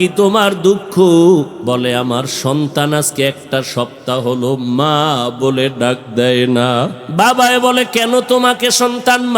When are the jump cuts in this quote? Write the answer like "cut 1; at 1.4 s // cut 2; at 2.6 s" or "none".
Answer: cut 1; at 1.6 s // cut 2; at 7.0 s